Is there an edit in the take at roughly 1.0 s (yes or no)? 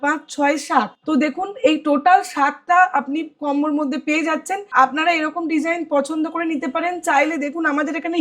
yes